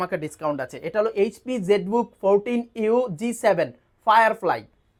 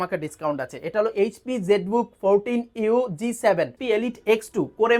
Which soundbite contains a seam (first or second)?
second